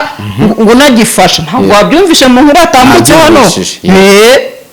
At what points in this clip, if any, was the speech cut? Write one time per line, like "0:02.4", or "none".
none